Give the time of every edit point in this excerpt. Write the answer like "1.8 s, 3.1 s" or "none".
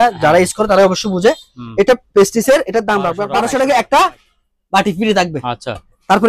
3.2 s